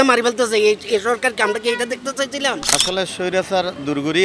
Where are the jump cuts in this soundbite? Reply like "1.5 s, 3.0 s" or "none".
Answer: 2.7 s